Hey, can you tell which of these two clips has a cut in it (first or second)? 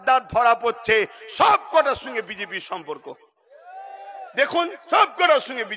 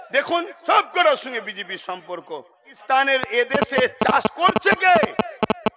second